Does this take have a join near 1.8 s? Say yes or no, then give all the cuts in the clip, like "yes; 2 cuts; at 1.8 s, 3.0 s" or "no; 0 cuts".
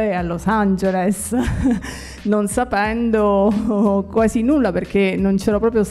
no; 0 cuts